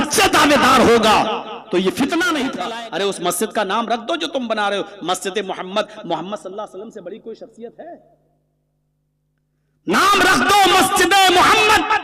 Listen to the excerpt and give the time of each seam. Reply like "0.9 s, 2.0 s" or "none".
2.6 s